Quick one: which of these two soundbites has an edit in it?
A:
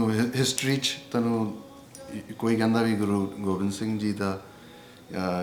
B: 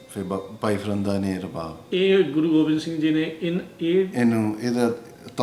B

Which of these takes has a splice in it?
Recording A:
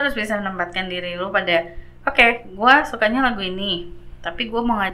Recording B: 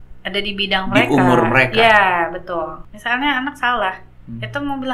B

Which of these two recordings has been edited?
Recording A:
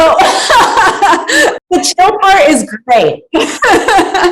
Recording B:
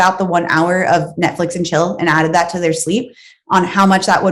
A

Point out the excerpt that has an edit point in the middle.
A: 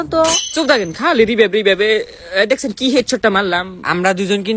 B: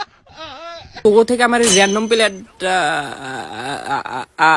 B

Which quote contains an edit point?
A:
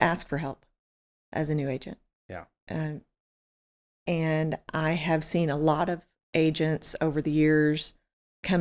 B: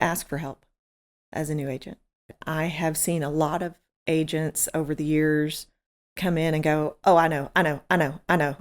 B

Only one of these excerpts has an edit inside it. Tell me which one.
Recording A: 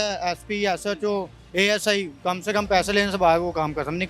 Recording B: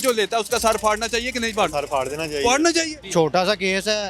B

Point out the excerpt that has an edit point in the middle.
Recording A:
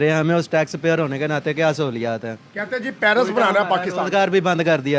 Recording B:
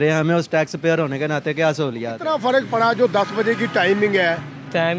B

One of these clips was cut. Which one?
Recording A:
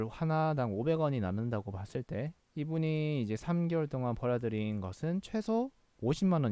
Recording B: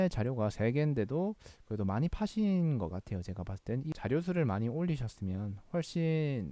B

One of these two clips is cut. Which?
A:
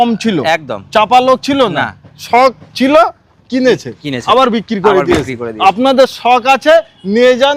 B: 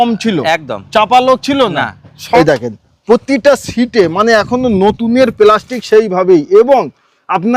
B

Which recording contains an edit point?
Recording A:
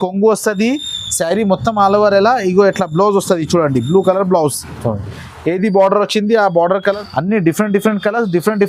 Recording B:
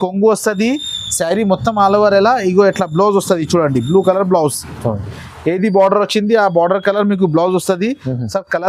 A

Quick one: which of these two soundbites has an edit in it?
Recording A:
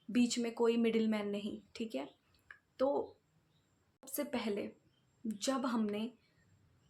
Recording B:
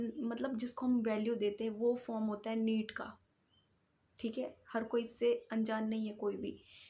A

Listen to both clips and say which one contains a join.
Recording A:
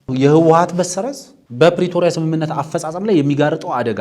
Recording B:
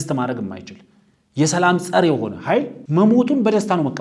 B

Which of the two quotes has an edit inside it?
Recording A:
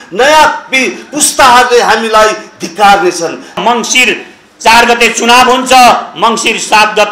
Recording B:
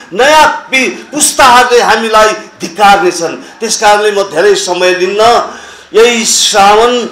A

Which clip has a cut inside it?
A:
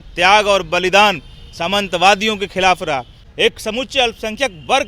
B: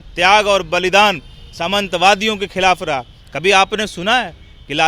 A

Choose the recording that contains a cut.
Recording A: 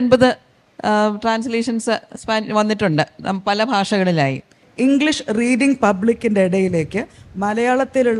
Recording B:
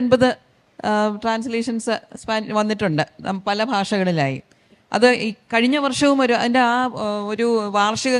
A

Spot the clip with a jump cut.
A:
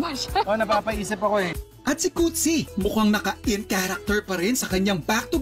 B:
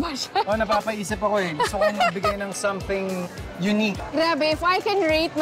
A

